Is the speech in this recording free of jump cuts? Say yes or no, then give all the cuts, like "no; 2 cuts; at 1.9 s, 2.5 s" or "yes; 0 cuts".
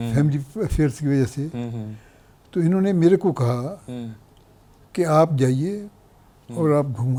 yes; 0 cuts